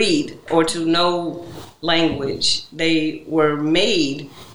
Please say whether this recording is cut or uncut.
uncut